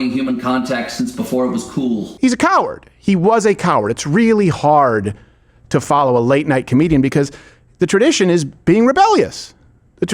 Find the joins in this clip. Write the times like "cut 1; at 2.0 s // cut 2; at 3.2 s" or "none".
cut 1; at 2.1 s